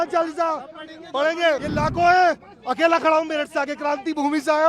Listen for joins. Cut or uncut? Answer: cut